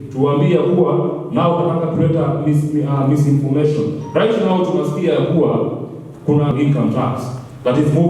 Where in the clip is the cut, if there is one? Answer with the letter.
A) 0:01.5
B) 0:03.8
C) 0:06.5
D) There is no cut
C